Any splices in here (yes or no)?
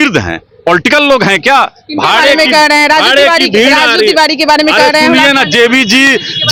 no